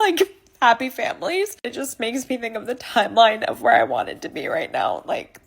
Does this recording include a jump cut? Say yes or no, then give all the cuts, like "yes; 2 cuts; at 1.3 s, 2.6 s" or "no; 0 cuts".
yes; 1 cut; at 1.7 s